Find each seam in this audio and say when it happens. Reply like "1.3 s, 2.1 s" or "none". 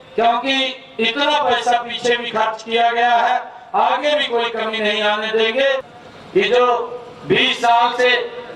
6.0 s